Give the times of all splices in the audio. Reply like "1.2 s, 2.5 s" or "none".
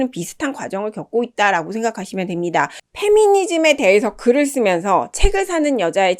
2.9 s